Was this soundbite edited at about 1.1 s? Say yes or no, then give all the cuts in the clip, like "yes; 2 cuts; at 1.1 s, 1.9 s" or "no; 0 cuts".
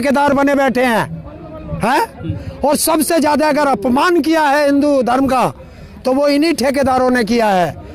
no; 0 cuts